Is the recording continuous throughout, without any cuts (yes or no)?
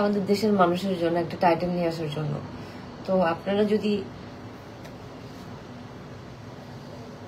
yes